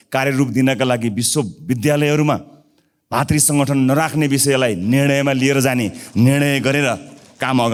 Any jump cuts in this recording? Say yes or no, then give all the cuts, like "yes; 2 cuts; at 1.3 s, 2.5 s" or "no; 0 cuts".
no; 0 cuts